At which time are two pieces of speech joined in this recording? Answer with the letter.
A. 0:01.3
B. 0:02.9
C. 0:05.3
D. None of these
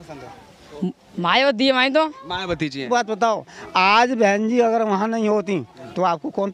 B